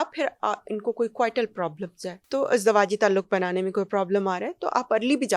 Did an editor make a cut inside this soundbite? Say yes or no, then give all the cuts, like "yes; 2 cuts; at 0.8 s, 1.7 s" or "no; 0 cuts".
yes; 1 cut; at 2.1 s